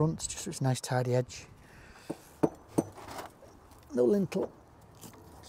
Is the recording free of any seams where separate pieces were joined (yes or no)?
no